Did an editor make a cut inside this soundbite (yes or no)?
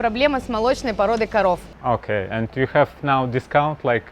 yes